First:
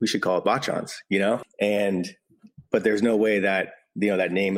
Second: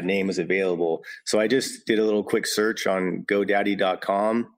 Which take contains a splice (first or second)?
first